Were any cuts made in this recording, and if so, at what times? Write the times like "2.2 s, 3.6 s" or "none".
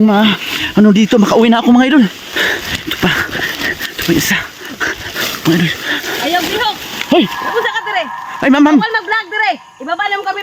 2.3 s